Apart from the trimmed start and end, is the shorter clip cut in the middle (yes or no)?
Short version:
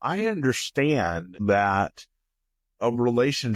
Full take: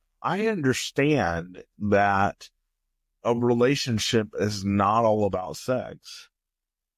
yes